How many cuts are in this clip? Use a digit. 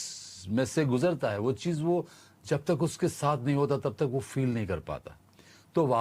0